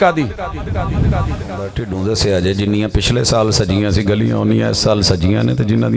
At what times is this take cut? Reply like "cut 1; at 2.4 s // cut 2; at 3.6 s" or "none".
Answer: cut 1; at 1.8 s